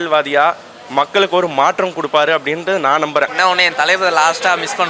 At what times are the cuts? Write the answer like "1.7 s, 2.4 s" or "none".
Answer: 3.3 s